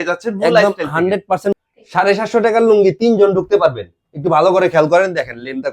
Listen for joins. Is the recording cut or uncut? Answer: cut